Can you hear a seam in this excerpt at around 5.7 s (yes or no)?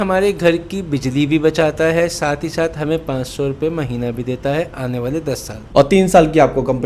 yes